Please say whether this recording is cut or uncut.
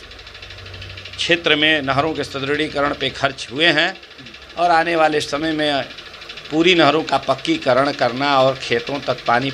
uncut